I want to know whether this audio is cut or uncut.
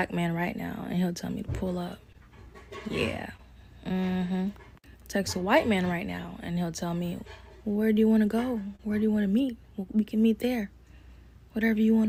uncut